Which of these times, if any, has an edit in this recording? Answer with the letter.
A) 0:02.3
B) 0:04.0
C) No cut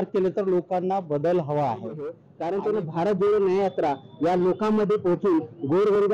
A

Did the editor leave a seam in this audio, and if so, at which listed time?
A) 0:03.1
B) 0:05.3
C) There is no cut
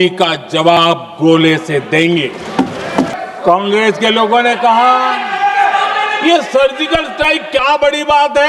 A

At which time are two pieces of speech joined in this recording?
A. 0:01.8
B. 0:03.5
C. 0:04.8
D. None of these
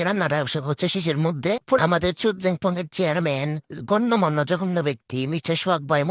A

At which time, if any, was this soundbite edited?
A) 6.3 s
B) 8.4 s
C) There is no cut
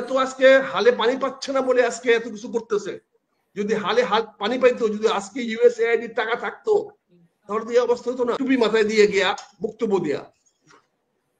B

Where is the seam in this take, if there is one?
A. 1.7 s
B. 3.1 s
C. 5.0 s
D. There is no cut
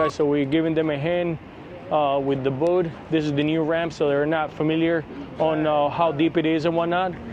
D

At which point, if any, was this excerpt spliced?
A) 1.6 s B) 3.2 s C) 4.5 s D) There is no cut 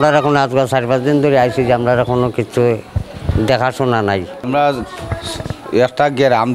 C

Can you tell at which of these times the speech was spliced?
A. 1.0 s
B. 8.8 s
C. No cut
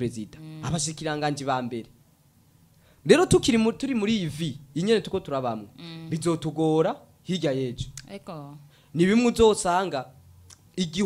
C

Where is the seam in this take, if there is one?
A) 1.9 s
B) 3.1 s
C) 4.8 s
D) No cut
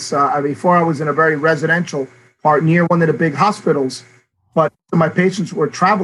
C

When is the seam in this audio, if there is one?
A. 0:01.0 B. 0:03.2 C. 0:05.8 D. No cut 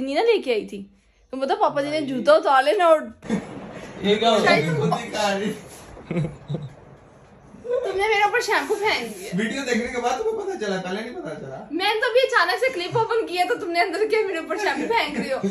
B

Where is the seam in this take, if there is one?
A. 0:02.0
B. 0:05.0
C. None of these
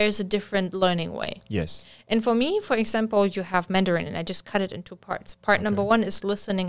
C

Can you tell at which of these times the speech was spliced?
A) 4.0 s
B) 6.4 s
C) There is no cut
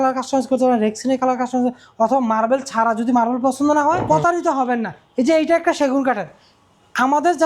A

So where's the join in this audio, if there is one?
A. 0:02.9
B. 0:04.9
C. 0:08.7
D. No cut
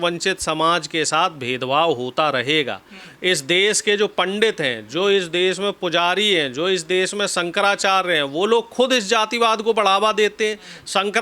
D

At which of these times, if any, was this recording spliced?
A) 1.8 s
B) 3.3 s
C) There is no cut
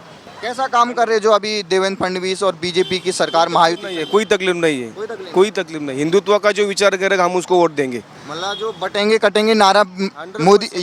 C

